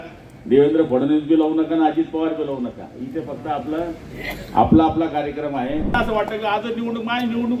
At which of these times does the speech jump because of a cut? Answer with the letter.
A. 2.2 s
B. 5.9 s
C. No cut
B